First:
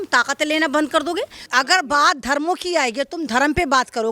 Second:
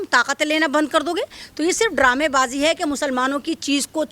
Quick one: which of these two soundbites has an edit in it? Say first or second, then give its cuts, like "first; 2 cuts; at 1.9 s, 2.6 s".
first; 1 cut; at 1.4 s